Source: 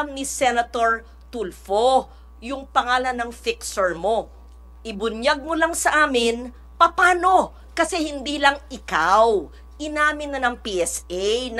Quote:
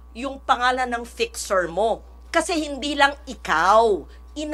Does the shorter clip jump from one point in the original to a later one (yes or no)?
yes